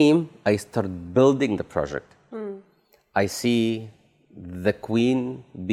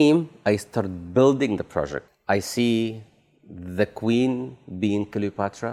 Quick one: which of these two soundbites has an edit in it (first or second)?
second